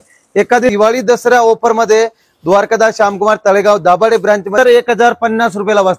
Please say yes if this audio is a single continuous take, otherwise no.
no